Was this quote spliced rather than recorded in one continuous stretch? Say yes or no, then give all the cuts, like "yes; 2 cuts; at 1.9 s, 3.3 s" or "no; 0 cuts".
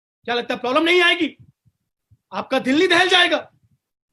no; 0 cuts